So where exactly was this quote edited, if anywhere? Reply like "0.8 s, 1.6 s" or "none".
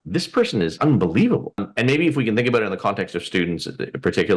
0.7 s, 1.7 s